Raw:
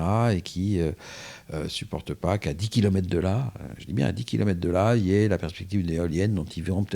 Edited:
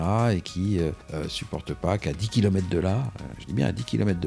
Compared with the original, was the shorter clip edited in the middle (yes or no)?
yes